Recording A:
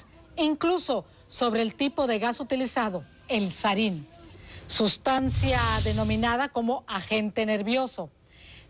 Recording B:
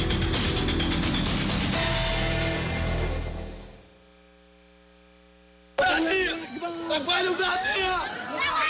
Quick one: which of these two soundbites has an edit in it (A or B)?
A